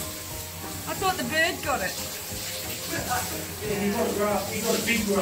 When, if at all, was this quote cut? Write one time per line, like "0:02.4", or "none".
none